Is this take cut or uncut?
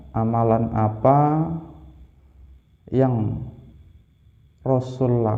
uncut